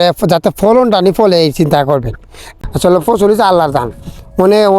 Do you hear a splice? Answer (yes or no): yes